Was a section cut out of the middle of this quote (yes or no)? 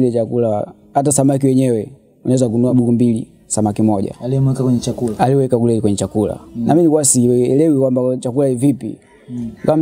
yes